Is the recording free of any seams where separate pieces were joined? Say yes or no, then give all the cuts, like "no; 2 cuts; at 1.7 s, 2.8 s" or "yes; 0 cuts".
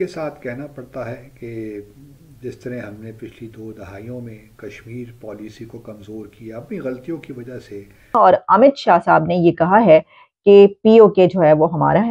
no; 1 cut; at 8.0 s